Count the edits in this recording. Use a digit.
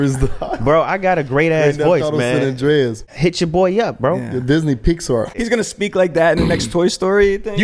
2